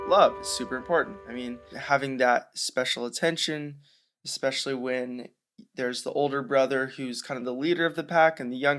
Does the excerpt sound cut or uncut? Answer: cut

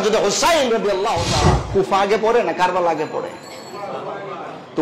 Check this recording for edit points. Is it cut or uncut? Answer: cut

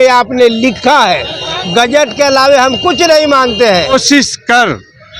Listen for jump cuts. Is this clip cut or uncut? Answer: cut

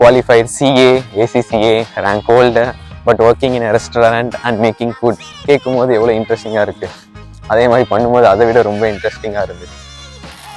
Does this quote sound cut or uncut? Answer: uncut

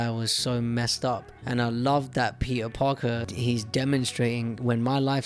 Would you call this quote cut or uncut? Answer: cut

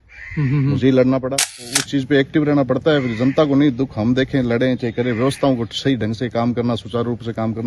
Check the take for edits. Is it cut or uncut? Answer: cut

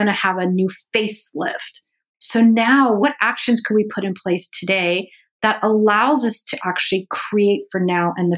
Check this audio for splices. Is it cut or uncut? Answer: cut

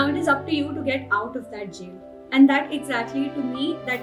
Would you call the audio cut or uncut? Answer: uncut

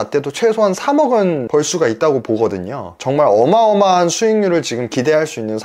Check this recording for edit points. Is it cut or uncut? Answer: uncut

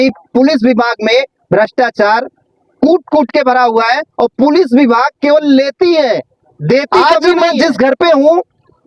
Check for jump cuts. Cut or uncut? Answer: cut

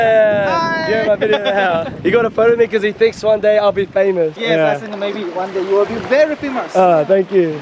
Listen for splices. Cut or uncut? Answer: cut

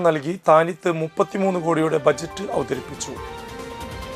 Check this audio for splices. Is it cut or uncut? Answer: uncut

